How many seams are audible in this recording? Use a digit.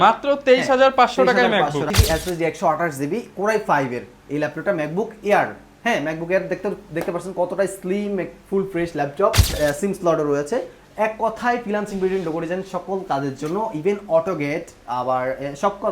2